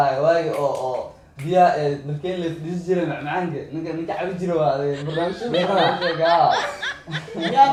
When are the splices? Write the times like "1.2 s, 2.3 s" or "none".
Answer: none